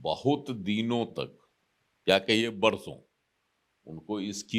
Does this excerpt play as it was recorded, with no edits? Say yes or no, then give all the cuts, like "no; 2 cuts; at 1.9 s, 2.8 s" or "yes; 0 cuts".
yes; 0 cuts